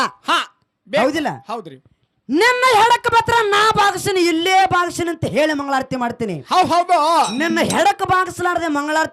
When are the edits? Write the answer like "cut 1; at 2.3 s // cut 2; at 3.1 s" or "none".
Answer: none